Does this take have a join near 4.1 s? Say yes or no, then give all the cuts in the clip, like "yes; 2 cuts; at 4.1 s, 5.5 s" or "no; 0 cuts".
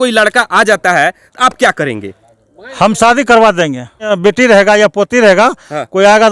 yes; 1 cut; at 4.1 s